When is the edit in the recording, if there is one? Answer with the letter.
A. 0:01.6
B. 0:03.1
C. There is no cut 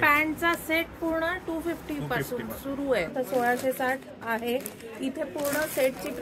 B